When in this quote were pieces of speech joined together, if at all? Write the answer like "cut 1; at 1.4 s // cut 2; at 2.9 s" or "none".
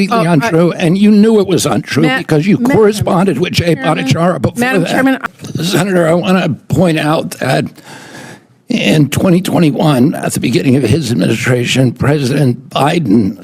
cut 1; at 5.2 s